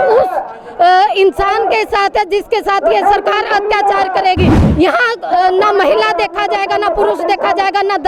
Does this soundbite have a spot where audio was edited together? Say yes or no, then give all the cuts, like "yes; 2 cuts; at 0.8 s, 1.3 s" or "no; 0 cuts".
no; 0 cuts